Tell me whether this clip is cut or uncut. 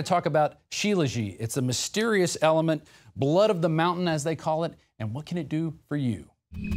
cut